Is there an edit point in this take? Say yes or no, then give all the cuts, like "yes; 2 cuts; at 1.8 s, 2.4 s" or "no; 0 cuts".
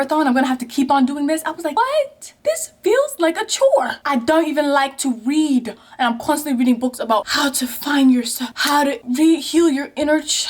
no; 0 cuts